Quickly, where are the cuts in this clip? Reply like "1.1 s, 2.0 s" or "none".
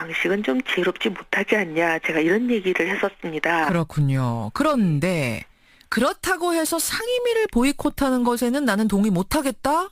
none